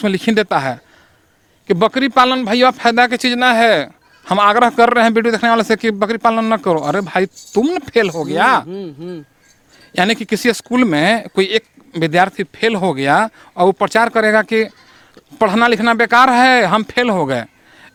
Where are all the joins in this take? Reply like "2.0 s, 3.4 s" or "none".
none

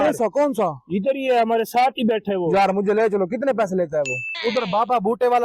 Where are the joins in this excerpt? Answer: 4.3 s

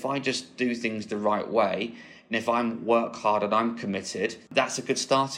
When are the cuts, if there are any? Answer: 4.5 s

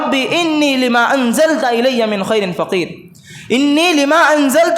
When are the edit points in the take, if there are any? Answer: none

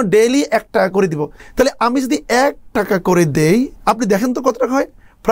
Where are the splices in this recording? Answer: 1.4 s, 3.7 s

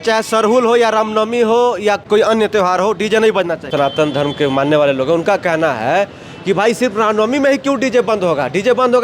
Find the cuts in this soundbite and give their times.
2.0 s, 3.7 s

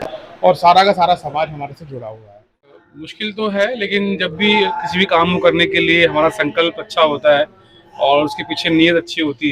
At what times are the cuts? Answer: 2.7 s

